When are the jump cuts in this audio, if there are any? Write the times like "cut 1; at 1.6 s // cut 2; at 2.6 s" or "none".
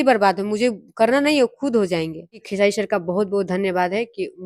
cut 1; at 2.4 s